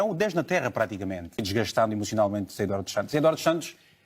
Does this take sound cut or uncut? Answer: cut